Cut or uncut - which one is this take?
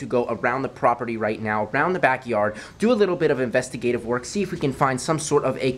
uncut